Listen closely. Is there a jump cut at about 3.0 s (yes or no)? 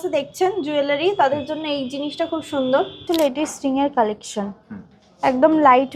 yes